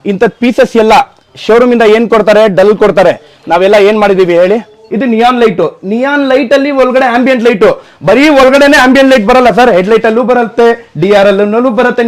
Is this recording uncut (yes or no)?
no